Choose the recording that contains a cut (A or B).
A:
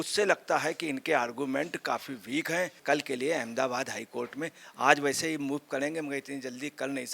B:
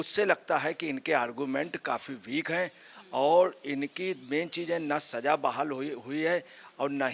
A